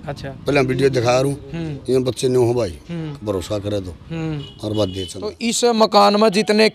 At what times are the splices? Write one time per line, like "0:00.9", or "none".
0:05.5